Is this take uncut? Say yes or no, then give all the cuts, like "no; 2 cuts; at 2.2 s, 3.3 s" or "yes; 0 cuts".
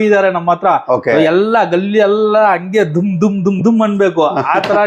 yes; 0 cuts